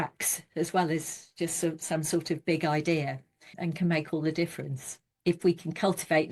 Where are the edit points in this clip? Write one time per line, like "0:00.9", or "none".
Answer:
0:03.5
0:05.2